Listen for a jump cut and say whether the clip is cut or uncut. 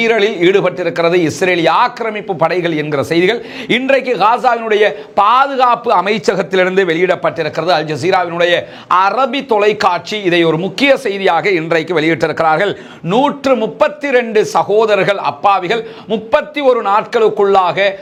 uncut